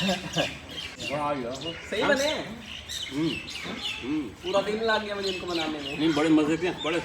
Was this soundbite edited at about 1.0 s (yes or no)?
yes